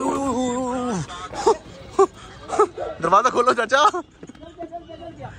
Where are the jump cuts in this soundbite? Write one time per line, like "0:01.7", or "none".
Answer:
none

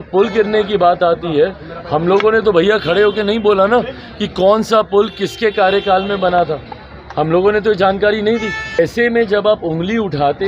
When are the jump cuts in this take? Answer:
0:08.8

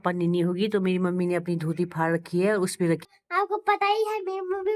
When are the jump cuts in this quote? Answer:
0:03.0

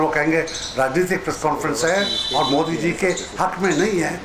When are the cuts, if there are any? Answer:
none

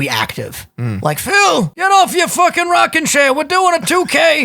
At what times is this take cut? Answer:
0:01.7

